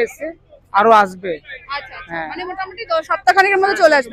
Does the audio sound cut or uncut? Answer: uncut